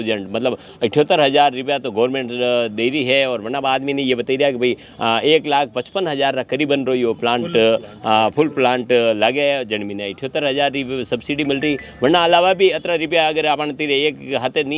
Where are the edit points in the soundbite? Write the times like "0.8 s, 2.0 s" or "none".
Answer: none